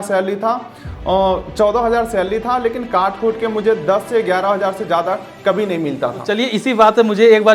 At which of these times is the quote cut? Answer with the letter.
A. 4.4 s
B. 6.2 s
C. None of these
B